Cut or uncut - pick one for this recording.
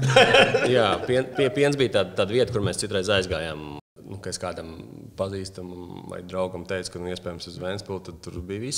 cut